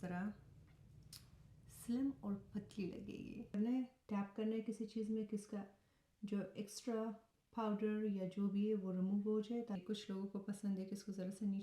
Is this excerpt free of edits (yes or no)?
no